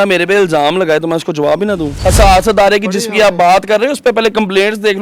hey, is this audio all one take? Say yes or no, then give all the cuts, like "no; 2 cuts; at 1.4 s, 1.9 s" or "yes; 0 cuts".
no; 1 cut; at 2.0 s